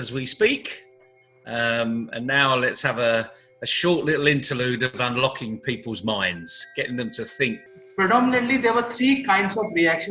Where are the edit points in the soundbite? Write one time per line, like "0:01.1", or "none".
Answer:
0:07.8